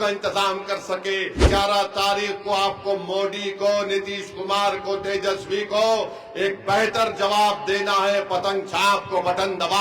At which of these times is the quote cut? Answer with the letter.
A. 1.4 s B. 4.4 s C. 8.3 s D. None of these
A